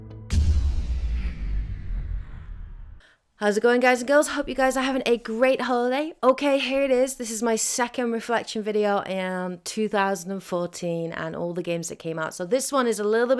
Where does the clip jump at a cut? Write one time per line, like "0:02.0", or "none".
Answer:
0:06.4